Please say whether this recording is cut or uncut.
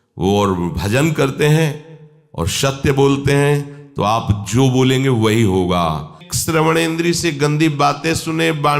cut